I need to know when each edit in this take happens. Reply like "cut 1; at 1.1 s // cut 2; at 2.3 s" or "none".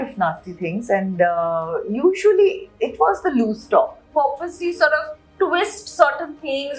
cut 1; at 4.0 s